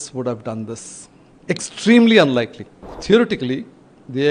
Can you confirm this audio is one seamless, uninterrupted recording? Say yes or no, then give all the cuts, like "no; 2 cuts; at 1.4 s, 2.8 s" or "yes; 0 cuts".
no; 1 cut; at 3.0 s